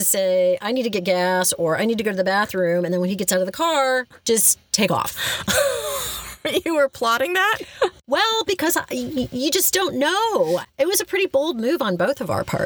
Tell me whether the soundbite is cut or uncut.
cut